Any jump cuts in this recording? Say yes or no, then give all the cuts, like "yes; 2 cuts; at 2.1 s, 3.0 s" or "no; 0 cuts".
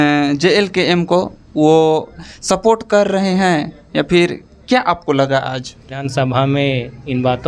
yes; 1 cut; at 6.0 s